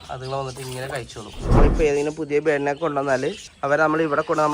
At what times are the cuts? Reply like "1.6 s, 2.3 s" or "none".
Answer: 1.6 s, 3.5 s